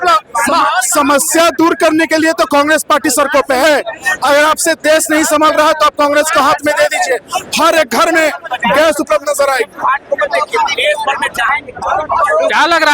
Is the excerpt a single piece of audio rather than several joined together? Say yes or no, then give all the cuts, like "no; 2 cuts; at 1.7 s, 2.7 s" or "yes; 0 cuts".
yes; 0 cuts